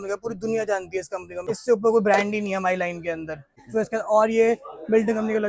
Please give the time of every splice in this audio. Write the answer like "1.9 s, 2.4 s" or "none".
1.5 s, 3.2 s